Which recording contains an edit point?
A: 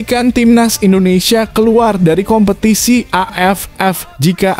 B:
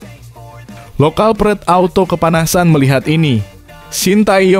B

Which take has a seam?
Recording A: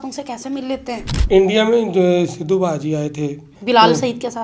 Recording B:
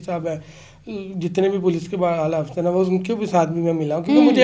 A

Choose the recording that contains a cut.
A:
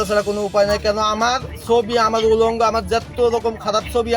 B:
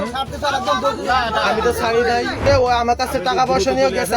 B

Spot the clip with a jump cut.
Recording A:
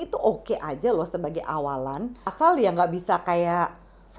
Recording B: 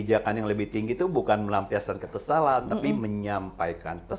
A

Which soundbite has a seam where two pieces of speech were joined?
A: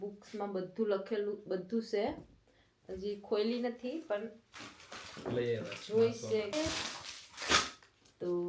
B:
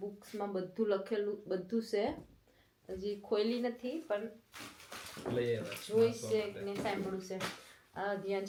A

